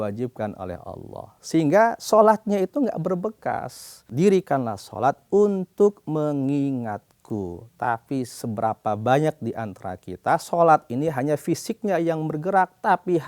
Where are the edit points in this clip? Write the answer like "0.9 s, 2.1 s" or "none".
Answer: 4.1 s